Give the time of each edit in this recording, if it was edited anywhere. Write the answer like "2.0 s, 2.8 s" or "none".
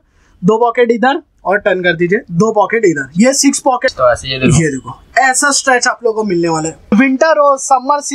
3.9 s, 6.9 s